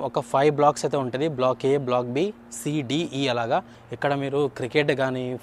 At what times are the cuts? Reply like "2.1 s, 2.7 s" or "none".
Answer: 3.8 s